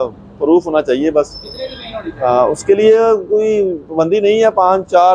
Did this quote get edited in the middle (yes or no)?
no